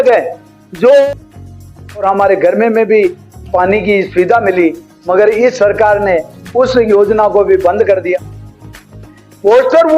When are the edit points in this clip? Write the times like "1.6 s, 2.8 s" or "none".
1.5 s, 8.8 s